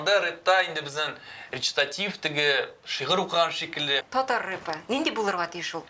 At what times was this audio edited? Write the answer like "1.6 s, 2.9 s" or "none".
4.0 s